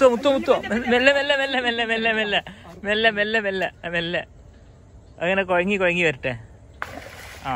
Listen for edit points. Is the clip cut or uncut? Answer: uncut